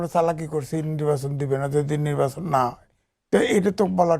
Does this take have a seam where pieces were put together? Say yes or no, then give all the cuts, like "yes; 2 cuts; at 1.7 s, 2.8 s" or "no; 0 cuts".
no; 0 cuts